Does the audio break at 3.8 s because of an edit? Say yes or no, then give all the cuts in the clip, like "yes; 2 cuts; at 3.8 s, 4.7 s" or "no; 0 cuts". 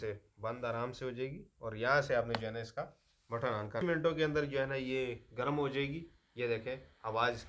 yes; 1 cut; at 3.8 s